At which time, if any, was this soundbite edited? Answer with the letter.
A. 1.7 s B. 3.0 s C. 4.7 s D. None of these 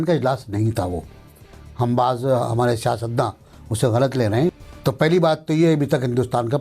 C